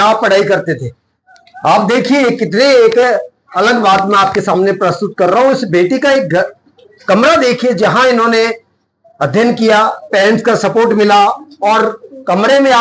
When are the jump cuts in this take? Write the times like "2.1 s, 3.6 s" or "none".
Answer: none